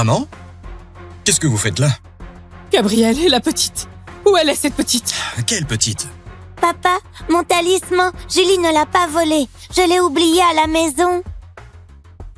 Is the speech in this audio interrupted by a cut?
no; 0 cuts

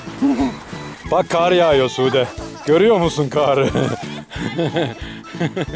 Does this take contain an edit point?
yes; 1 cut; at 0.9 s

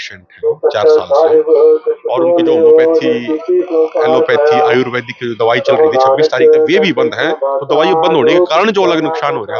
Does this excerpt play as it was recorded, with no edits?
yes; 0 cuts

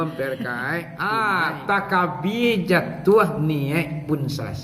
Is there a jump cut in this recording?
yes; 1 cut; at 0.9 s

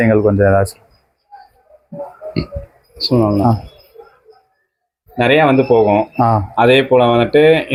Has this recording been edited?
no; 0 cuts

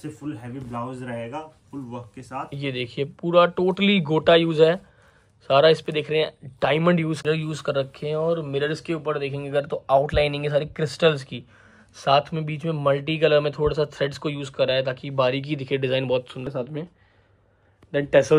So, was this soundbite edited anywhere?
yes; 2 cuts; at 7.2 s, 16.5 s

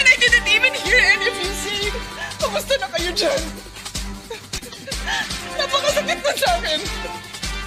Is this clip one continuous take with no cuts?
no; 1 cut; at 6.0 s

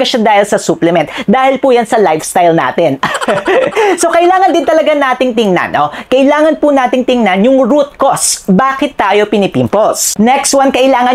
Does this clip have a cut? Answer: no; 0 cuts

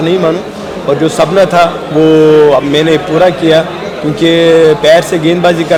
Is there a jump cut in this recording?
no; 0 cuts

